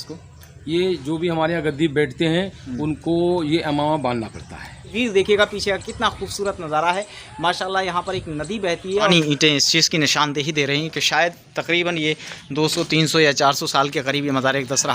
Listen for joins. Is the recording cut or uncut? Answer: cut